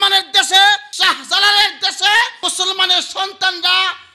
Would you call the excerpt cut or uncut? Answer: cut